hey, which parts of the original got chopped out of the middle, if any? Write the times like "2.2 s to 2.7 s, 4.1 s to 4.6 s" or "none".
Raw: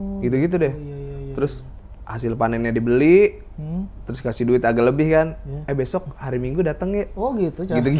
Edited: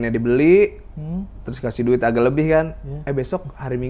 none